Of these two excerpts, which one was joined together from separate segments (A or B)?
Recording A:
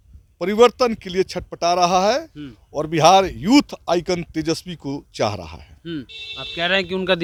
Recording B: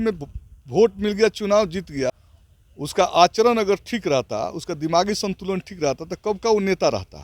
B